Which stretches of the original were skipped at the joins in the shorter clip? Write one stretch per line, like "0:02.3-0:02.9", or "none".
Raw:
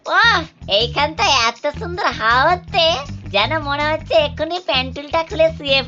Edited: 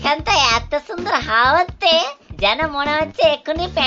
none

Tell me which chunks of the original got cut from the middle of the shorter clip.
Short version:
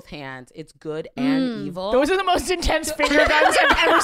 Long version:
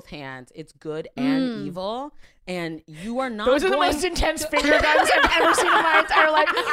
0:01.9-0:03.4

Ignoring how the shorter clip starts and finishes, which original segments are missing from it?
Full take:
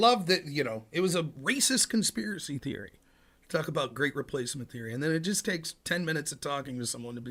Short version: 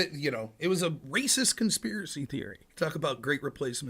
0:02.9-0:03.3

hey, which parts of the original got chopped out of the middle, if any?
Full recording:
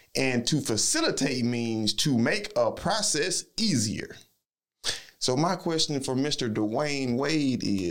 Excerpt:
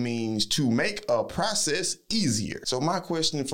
0:04.1-0:05.2

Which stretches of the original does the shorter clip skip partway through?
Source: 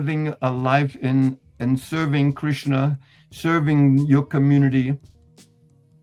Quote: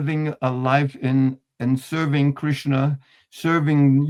none

